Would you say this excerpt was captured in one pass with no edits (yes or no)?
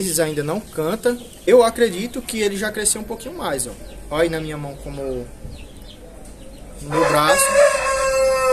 no